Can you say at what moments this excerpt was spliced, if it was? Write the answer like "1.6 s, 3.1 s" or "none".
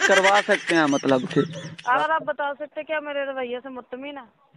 2.0 s